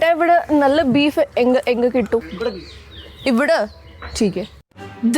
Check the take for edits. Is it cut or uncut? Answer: cut